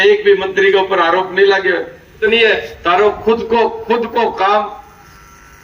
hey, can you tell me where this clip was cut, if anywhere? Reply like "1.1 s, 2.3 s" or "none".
2.2 s

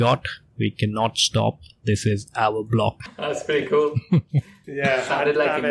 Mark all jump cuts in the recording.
3.1 s

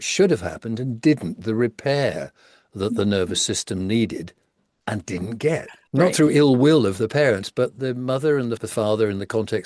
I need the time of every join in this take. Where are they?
5.8 s

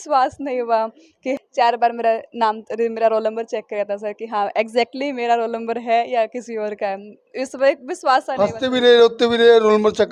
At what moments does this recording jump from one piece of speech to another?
1.3 s

